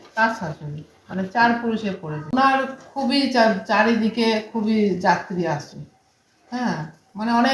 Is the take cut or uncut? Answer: cut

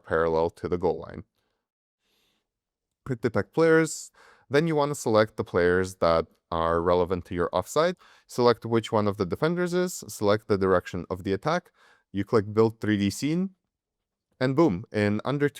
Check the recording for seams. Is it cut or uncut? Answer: cut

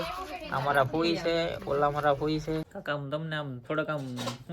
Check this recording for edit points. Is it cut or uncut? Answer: cut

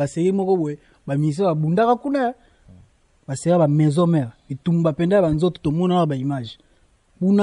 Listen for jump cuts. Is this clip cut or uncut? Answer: uncut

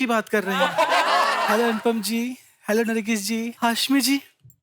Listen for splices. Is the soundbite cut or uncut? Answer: cut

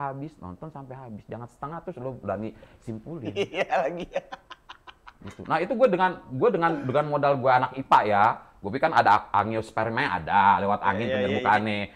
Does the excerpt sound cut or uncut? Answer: uncut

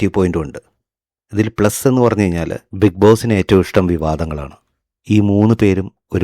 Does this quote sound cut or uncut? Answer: cut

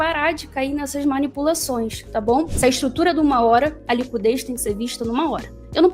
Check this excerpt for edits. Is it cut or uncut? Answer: cut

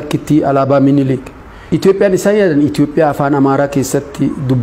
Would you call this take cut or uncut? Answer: uncut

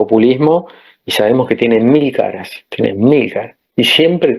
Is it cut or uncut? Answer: uncut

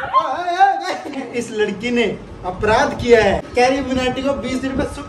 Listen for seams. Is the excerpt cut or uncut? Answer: cut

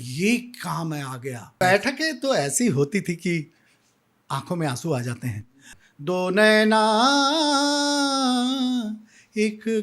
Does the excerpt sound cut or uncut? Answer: cut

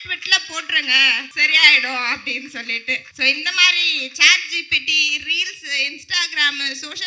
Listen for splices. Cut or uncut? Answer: cut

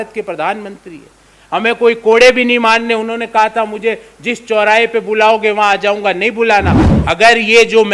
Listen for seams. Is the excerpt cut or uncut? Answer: cut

